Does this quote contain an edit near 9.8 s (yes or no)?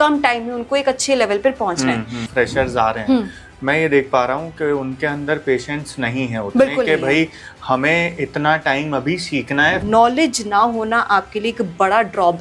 yes